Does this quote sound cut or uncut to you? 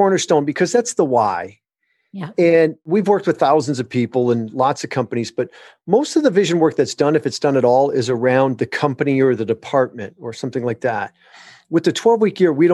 cut